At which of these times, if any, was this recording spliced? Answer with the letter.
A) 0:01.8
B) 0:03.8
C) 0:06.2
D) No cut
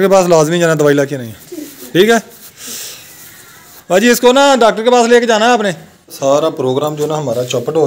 C